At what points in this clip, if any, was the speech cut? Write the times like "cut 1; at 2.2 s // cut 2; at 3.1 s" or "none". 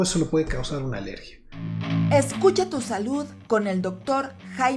cut 1; at 1.7 s